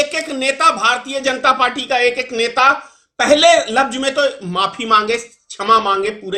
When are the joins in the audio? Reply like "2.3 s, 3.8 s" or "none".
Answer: none